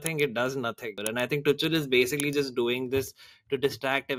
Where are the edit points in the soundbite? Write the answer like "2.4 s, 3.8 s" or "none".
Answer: 1.0 s